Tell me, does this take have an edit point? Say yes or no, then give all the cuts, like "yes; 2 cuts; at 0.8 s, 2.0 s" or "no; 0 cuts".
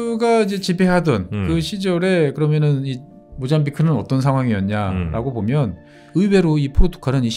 yes; 1 cut; at 6.0 s